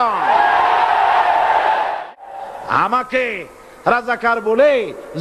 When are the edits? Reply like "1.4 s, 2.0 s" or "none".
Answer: 2.1 s